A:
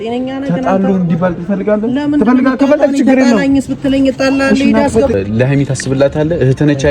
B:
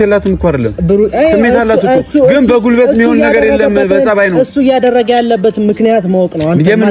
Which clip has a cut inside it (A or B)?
A